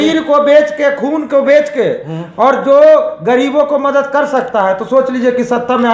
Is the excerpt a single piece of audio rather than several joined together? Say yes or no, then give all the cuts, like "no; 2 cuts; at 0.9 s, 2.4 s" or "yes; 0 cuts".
yes; 0 cuts